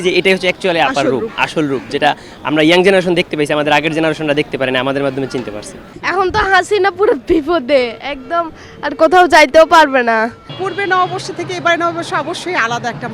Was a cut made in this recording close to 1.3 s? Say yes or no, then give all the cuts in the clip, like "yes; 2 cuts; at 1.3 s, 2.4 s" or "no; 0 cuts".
no; 2 cuts; at 6.0 s, 10.6 s